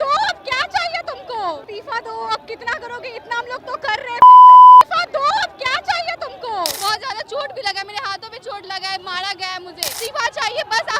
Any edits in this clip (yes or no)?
yes